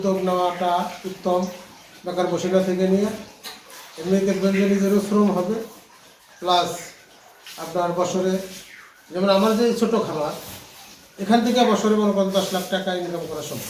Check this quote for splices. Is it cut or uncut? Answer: uncut